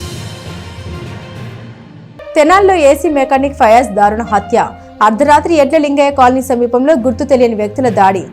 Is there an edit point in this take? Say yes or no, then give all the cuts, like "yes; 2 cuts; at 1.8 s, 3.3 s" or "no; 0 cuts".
yes; 1 cut; at 2.1 s